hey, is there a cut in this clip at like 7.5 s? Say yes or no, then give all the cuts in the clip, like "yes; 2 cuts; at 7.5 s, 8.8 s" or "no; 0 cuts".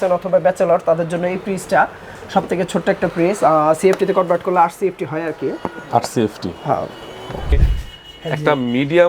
yes; 1 cut; at 7.5 s